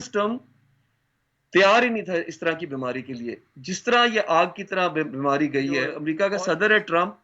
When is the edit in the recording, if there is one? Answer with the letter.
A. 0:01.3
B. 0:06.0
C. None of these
B